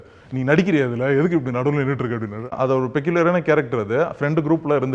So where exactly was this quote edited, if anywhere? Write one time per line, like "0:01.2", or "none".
0:02.5